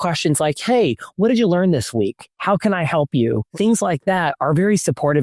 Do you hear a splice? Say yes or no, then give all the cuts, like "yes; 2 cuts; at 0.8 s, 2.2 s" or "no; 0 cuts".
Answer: no; 0 cuts